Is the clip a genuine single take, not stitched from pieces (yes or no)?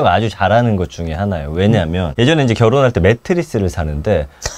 no